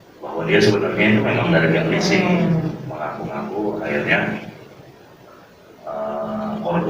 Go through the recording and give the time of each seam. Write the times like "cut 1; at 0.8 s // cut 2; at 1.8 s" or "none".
none